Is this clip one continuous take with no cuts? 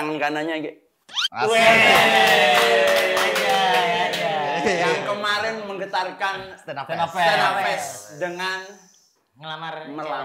yes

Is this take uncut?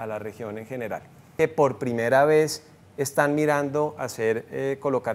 no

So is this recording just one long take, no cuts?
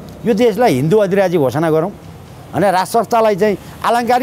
yes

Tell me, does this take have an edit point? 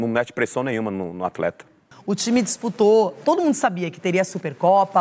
yes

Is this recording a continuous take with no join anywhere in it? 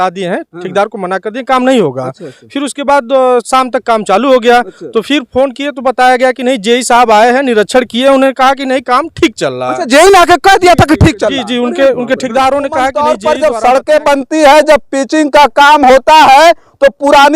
no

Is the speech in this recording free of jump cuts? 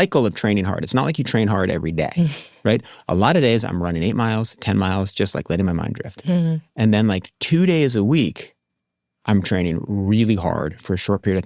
yes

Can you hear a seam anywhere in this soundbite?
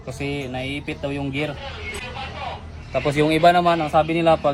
yes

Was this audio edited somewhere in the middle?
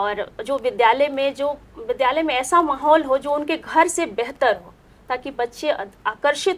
no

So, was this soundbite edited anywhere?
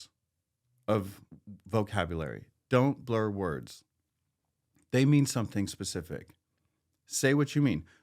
no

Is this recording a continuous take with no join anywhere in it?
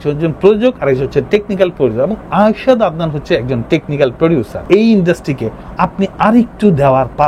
yes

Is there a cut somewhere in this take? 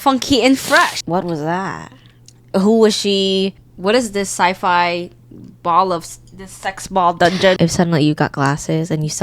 yes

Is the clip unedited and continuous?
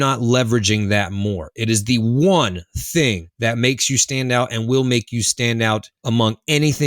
no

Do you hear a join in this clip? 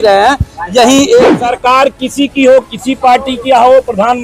yes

